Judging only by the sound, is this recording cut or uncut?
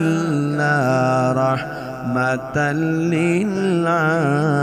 uncut